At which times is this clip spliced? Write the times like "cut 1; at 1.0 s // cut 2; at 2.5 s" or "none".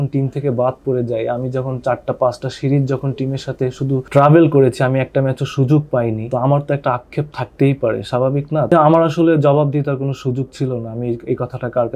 cut 1; at 4.1 s // cut 2; at 6.3 s // cut 3; at 8.7 s